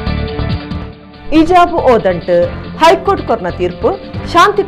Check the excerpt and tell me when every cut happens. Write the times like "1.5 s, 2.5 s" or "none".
1.0 s